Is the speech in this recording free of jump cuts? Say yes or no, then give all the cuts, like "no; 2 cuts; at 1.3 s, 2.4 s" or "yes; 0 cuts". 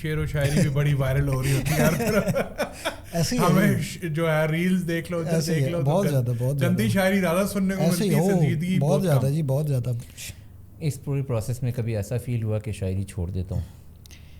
yes; 0 cuts